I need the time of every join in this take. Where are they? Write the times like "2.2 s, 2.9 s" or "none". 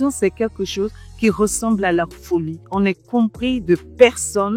2.6 s

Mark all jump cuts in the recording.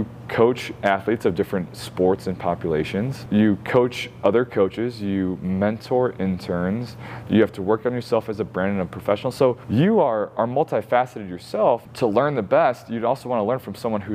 3.2 s, 9.6 s, 11.9 s

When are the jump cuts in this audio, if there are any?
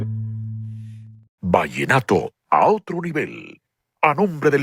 1.4 s

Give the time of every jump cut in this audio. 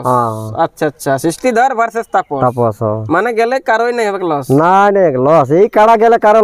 none

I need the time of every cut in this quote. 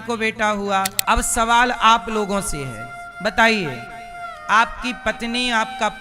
1.0 s

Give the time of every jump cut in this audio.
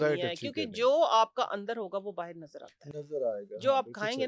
none

